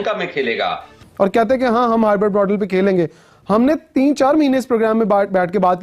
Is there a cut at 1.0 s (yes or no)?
yes